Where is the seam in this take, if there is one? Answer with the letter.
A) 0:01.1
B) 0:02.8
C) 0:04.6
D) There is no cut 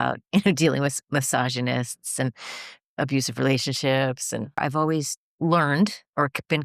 C